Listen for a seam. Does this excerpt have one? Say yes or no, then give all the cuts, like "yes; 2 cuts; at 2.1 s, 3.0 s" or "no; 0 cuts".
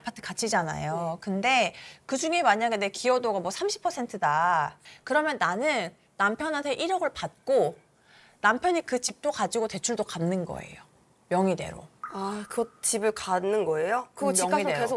no; 0 cuts